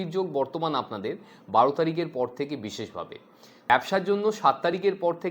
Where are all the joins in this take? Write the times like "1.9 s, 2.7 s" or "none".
3.7 s